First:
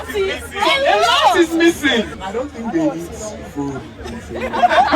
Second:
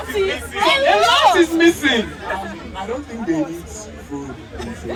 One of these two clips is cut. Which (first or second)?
first